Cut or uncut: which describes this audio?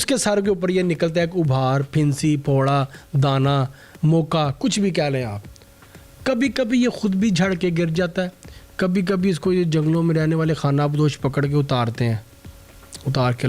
uncut